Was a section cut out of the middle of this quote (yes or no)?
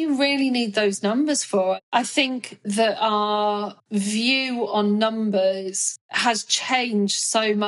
yes